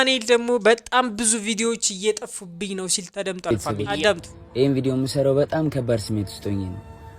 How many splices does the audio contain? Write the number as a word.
one